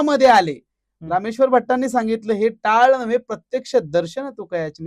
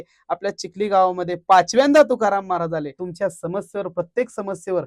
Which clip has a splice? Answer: second; 1 cut; at 3.0 s

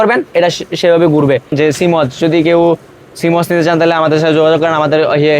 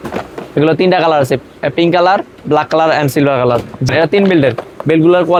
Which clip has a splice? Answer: first; 1 cut; at 1.5 s

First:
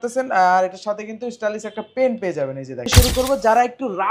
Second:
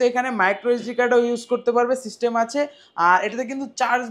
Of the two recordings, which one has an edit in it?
first; 1 cut; at 2.9 s

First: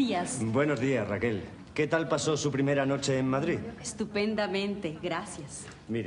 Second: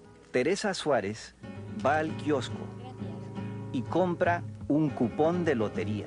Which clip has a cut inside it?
second; 1 cut; at 4.5 s

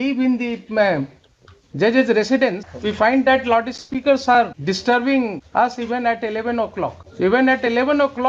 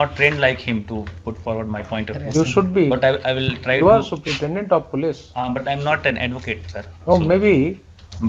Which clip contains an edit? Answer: first; 4 cuts; at 2.7 s, 4.6 s, 5.4 s, 7.0 s

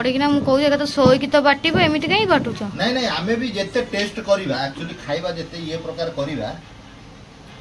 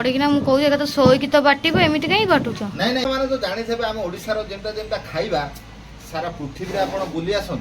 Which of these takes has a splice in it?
second; 1 cut; at 3.0 s

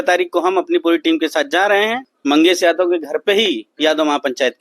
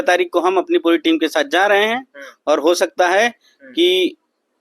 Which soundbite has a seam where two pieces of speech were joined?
first; 1 cut; at 2.1 s

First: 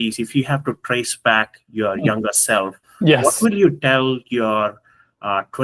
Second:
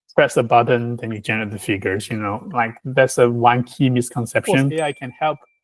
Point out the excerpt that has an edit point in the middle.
second; 1 cut; at 4.7 s

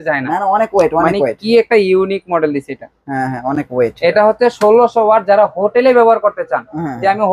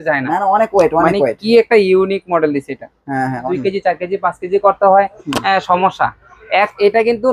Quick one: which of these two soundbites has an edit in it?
second; 1 cut; at 3.5 s

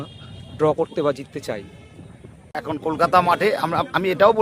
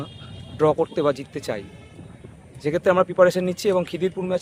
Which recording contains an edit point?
first; 1 cut; at 2.6 s

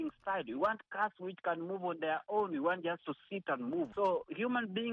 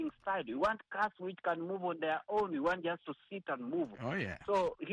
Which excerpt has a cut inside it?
first; 1 cut; at 3.9 s

